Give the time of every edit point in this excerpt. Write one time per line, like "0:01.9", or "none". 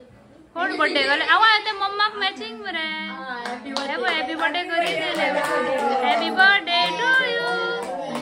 none